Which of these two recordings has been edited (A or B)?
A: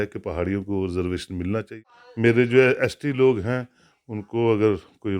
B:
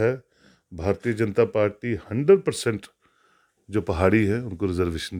A